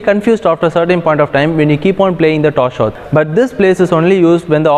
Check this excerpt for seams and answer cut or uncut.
cut